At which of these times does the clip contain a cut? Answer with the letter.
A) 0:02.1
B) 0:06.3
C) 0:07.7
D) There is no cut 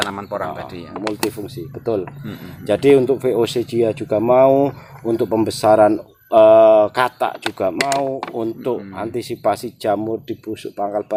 D